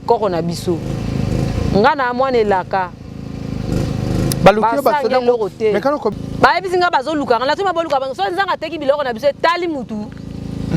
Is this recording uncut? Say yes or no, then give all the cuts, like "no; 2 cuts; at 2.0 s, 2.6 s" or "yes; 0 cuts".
no; 1 cut; at 6.1 s